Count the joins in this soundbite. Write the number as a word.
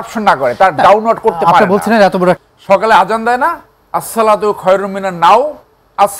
one